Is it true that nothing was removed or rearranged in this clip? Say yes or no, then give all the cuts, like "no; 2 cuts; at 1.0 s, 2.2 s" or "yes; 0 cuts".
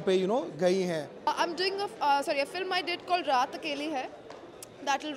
no; 1 cut; at 1.3 s